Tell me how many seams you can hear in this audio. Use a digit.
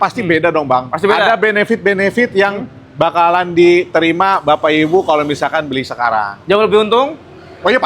0